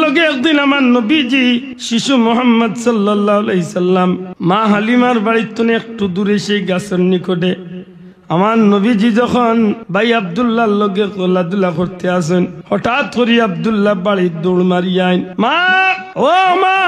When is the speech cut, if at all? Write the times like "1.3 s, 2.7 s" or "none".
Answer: 1.7 s, 4.3 s, 9.8 s, 12.6 s, 15.6 s